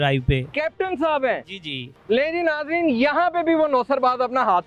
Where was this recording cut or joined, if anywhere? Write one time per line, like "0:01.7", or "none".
none